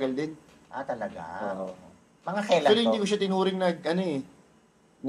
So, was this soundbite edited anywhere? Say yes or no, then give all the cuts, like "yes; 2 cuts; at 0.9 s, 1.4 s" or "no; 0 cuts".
no; 0 cuts